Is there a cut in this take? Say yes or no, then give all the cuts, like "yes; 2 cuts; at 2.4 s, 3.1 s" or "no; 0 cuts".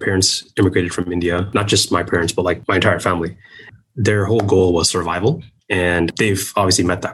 no; 0 cuts